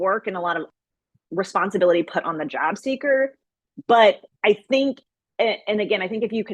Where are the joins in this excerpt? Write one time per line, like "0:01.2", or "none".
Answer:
0:01.2